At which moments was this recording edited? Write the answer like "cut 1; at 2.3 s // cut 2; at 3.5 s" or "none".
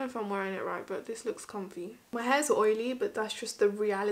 cut 1; at 2.1 s